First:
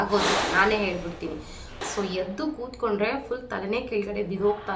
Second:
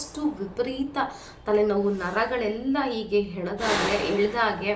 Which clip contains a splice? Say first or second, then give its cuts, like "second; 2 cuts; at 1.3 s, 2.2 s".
first; 1 cut; at 1.8 s